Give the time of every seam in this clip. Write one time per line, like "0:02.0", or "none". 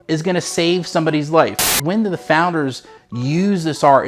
0:01.7